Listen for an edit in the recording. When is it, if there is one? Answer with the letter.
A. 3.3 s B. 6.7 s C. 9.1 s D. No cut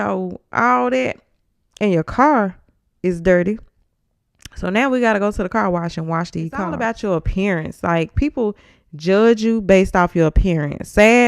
B